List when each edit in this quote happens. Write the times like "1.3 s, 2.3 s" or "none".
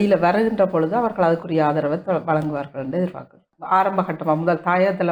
3.5 s